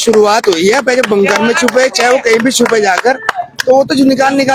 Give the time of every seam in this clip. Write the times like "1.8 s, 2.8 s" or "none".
none

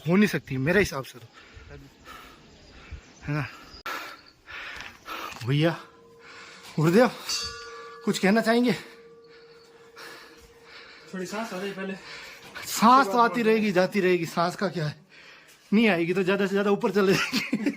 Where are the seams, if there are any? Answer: 3.7 s

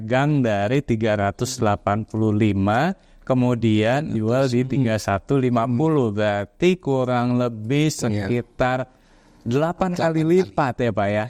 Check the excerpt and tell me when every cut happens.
none

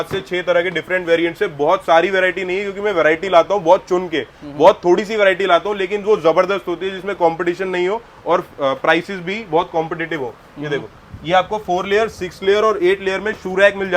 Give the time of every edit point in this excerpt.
none

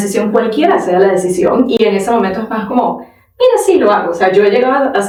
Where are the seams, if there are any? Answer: none

